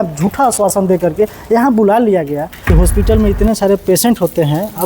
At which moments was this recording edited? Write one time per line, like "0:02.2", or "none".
0:02.6